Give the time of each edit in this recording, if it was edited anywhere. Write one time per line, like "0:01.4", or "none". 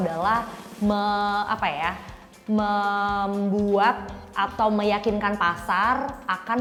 none